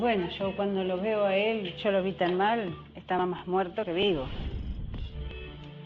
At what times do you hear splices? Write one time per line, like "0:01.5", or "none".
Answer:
0:01.7